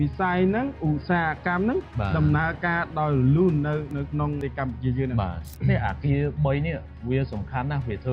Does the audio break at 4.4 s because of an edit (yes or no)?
yes